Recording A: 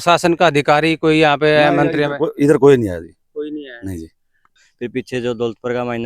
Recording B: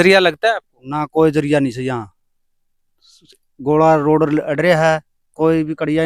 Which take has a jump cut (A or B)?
A